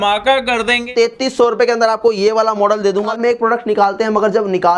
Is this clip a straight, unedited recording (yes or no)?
no